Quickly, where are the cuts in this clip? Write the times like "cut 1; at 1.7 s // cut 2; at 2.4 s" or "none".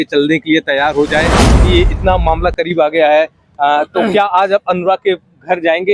cut 1; at 1.5 s